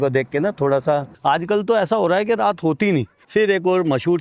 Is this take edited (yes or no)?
yes